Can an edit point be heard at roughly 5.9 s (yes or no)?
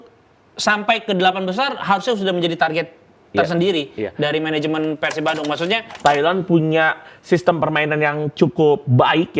yes